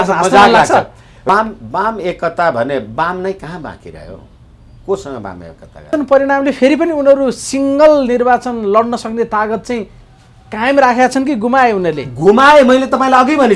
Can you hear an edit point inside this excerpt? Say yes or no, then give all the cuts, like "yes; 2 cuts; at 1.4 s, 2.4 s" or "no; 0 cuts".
yes; 2 cuts; at 1.2 s, 5.9 s